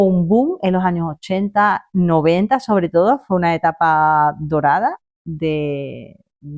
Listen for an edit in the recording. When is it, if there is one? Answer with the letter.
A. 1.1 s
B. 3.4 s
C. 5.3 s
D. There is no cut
D